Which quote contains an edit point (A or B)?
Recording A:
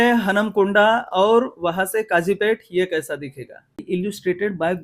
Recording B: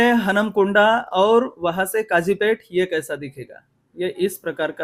A